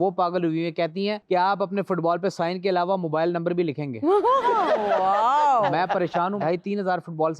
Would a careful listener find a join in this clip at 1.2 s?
yes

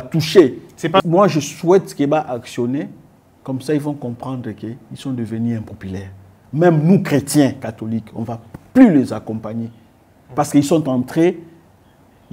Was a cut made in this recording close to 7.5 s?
no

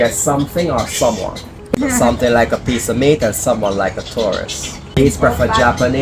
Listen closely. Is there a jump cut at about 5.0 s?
yes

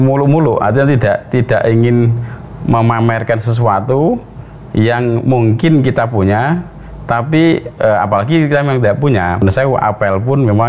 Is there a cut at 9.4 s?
yes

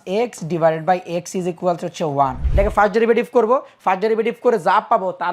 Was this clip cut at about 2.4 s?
yes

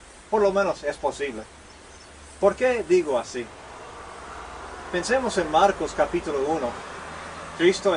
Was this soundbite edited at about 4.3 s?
no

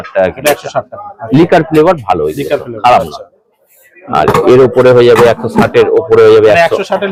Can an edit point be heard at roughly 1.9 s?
no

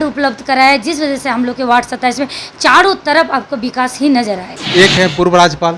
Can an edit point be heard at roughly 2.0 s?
no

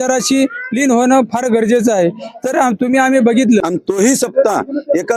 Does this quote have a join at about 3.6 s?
yes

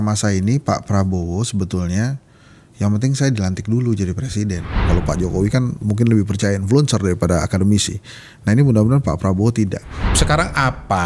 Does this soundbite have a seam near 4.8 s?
yes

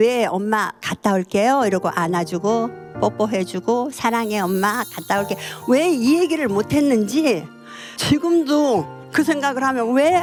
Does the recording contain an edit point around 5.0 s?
no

